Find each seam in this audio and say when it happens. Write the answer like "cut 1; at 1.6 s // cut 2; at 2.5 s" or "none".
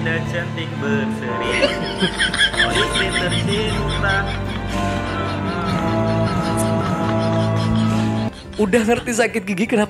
none